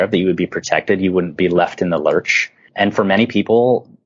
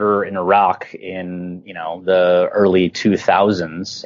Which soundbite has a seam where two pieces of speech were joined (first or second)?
first